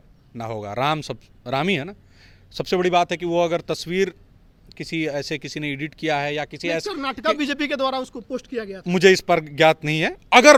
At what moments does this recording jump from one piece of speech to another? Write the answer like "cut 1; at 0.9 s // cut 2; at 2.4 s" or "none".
none